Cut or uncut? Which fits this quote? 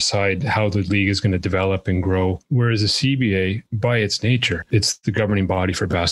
cut